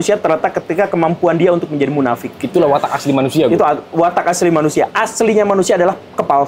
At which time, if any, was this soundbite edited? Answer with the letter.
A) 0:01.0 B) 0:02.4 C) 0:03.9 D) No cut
D